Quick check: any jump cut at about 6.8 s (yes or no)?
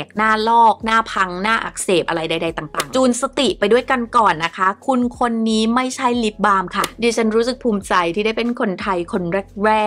yes